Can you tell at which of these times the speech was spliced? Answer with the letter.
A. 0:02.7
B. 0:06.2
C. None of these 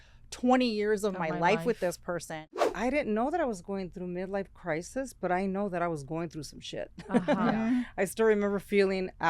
A